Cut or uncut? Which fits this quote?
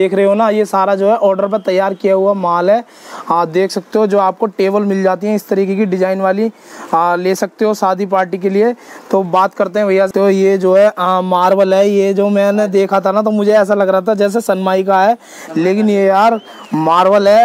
cut